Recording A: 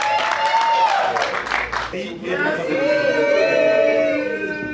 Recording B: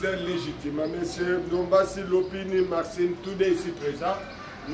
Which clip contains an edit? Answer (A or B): A